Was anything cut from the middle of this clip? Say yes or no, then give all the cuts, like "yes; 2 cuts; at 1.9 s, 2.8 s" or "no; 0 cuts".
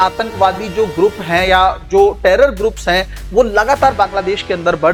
no; 0 cuts